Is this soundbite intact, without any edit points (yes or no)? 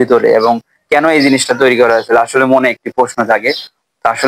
yes